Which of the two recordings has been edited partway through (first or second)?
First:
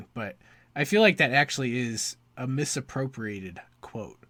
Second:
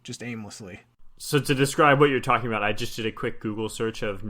second